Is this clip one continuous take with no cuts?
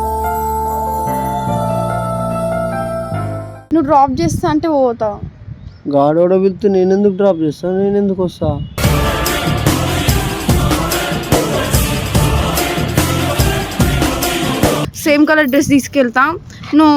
no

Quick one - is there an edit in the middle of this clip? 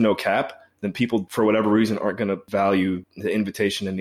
yes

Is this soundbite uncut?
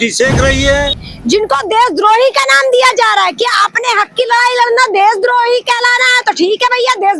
no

